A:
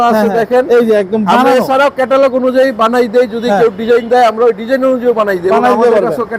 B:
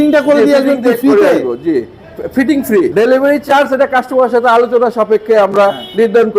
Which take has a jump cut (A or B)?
B